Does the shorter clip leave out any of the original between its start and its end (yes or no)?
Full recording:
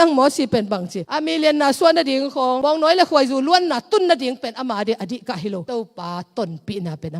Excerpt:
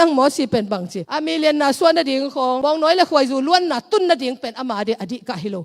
no